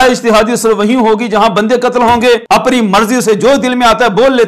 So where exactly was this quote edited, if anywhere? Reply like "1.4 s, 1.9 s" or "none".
2.4 s